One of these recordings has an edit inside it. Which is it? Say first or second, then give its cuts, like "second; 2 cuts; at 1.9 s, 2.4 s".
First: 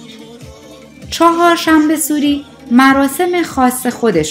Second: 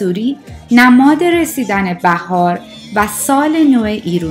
first; 1 cut; at 1.2 s